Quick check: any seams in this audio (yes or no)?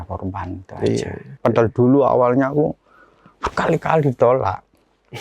yes